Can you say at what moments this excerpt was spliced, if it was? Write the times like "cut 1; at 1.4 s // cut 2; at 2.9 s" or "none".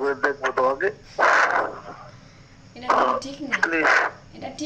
cut 1; at 1.0 s